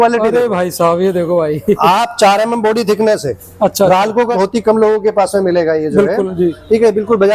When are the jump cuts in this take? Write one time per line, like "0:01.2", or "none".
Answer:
0:04.3